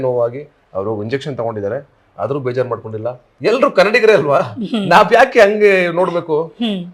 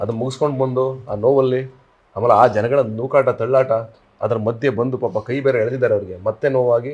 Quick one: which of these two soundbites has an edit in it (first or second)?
first